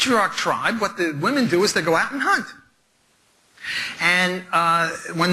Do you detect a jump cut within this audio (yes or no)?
yes